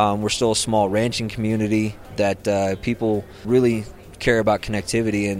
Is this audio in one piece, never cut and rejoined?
no; 2 cuts; at 2.0 s, 3.4 s

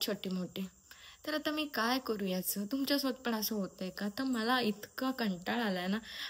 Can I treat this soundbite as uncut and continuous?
yes; 0 cuts

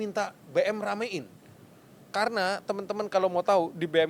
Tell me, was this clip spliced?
no; 0 cuts

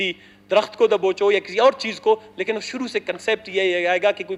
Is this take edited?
no; 0 cuts

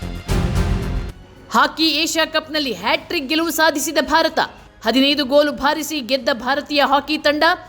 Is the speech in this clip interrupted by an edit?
yes; 1 cut; at 1.1 s

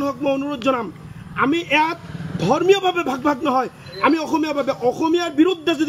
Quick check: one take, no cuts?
yes; 0 cuts

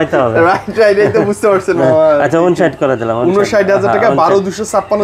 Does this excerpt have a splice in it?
no; 0 cuts

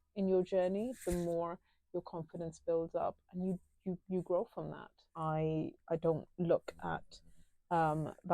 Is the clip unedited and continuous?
no; 1 cut; at 5.1 s

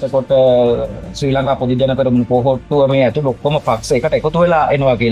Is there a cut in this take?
no; 0 cuts

